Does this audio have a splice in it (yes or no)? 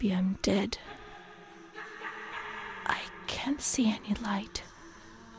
no